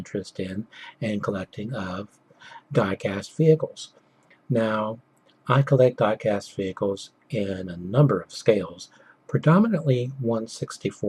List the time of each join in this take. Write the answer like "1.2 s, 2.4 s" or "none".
3.5 s